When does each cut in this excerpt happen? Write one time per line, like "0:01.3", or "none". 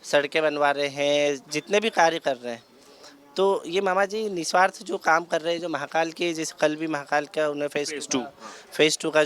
none